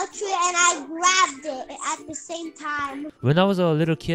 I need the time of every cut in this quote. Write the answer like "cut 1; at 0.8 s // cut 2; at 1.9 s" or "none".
cut 1; at 3.1 s